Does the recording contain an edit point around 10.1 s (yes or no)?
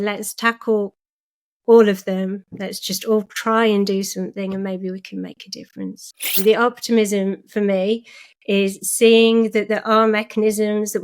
no